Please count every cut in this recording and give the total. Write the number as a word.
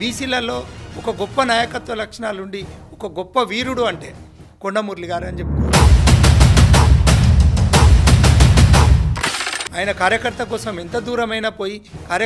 one